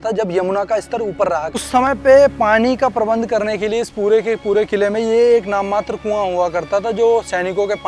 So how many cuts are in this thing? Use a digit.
1